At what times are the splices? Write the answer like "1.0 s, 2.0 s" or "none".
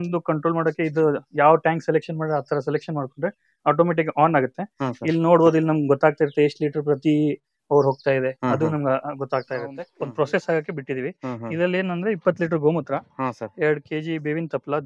9.8 s